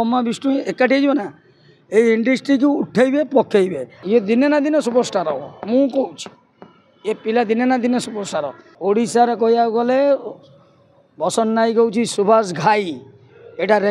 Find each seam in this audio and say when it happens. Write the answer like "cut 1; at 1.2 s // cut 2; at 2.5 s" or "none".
cut 1; at 4.0 s // cut 2; at 8.6 s